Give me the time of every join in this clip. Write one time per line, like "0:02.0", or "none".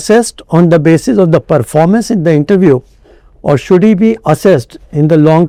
none

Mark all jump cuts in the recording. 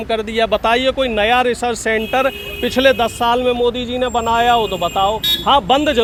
none

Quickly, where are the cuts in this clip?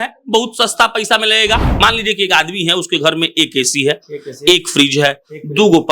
0:01.8

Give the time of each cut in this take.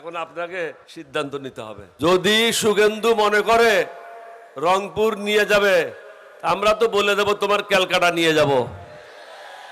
0:00.9
0:01.9

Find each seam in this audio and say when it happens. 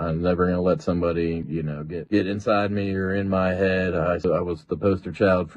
0:04.2

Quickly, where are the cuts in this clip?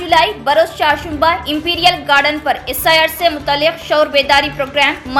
none

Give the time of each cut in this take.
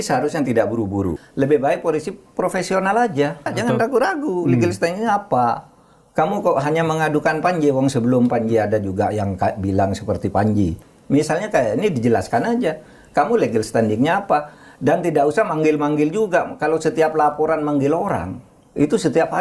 0:01.2
0:03.5
0:10.9

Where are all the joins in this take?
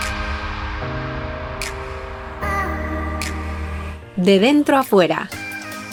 none

